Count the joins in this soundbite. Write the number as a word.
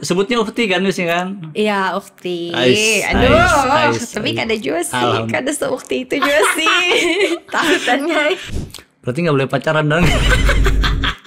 one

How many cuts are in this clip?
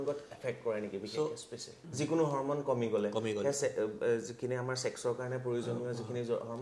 one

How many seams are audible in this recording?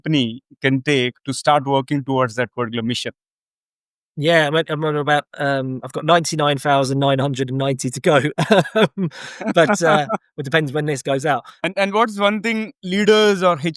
one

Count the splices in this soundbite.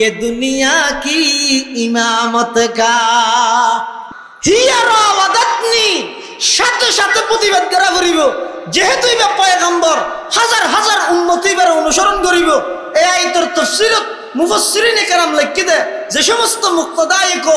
one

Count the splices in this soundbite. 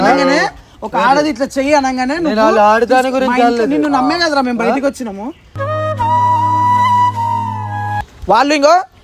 one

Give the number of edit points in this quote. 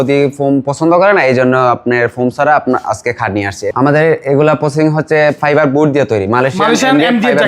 one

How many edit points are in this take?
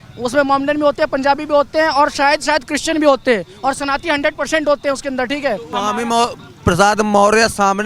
one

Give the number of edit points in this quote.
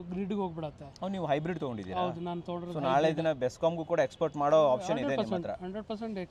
zero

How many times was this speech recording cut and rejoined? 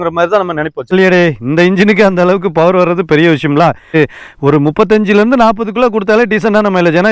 two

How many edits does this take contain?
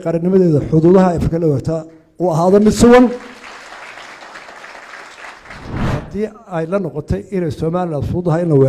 one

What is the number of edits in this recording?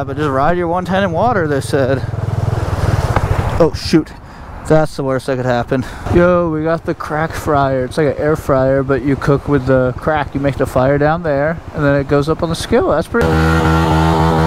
two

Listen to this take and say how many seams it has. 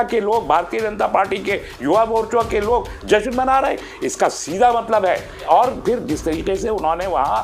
one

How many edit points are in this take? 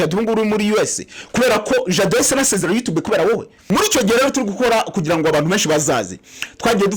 one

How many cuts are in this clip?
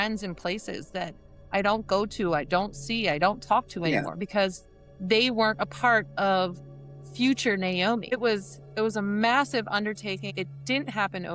two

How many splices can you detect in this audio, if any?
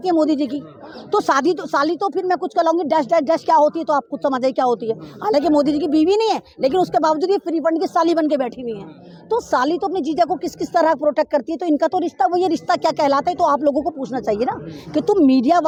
zero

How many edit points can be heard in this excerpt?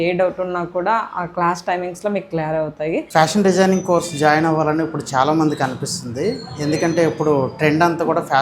one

